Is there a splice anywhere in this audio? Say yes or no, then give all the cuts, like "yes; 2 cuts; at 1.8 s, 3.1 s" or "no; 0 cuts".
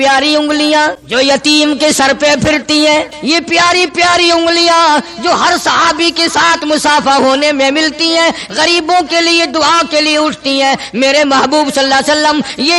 yes; 2 cuts; at 1.0 s, 3.1 s